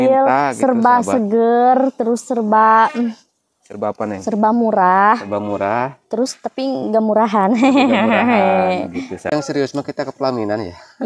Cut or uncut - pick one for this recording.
cut